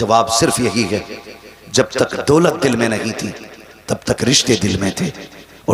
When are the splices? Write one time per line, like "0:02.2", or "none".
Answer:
none